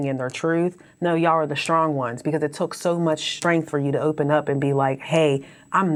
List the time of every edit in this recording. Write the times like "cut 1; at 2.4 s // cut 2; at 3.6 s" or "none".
none